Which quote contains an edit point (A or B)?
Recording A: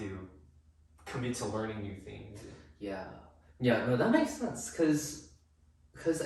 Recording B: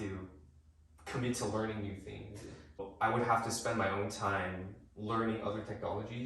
B